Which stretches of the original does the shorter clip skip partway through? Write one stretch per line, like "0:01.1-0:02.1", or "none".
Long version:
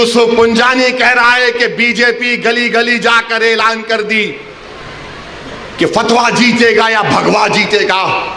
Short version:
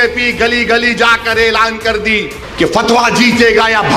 0:04.5-0:05.6